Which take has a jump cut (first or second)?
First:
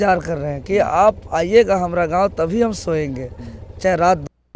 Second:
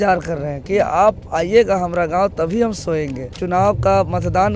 second